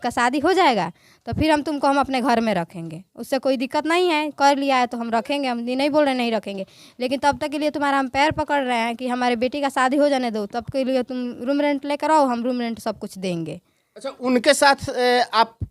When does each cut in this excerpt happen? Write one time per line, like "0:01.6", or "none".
none